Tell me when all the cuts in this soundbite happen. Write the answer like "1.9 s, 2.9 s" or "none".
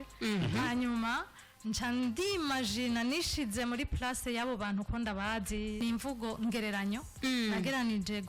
5.8 s